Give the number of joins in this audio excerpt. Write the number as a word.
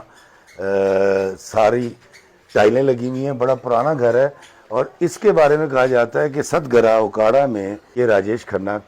one